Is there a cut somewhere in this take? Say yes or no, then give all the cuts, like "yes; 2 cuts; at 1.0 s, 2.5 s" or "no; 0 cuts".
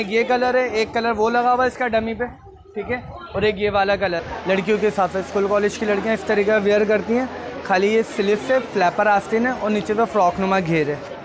yes; 1 cut; at 4.3 s